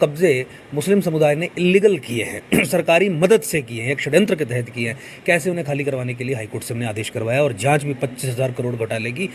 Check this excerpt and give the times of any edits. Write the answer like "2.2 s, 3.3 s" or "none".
none